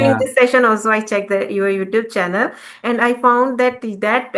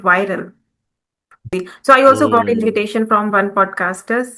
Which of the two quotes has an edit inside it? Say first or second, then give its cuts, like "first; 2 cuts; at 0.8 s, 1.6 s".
second; 1 cut; at 1.5 s